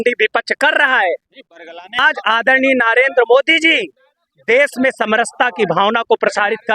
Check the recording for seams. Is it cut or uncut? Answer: cut